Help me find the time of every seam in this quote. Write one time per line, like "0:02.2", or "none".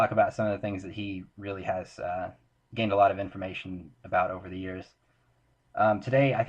0:03.3